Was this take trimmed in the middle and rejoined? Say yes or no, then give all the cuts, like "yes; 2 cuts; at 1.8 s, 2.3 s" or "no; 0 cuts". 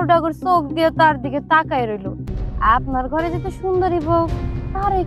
yes; 1 cut; at 2.3 s